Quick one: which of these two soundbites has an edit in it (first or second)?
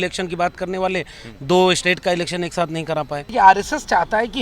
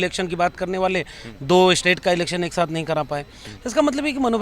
first